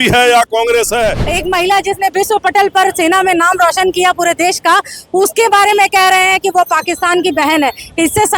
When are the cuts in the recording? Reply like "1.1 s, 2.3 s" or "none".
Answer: 1.2 s

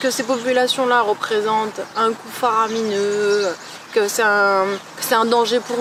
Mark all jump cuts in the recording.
none

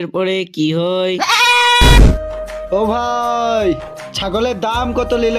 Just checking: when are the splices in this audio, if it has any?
2.1 s

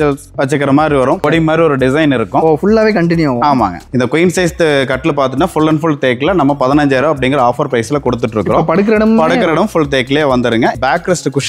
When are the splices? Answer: 1.2 s, 3.9 s, 10.8 s

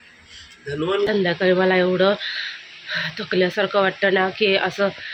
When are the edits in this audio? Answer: 1.1 s

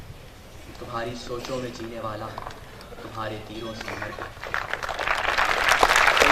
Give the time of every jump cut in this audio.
none

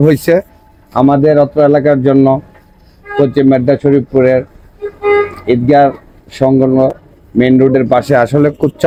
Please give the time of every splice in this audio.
none

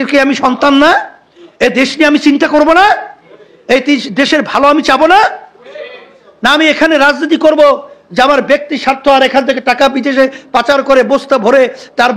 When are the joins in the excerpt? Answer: none

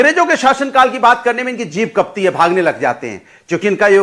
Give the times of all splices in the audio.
none

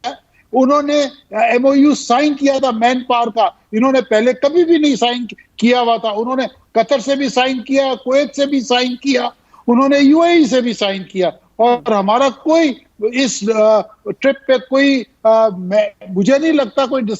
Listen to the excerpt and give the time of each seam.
none

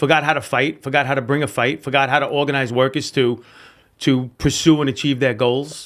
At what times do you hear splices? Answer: none

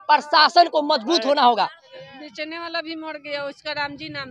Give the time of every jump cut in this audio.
1.8 s

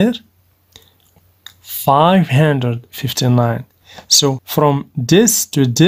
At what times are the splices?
1.0 s, 4.4 s

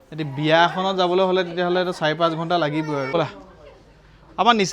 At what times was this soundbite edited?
3.1 s

